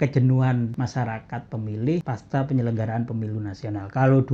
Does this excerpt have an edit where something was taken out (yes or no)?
yes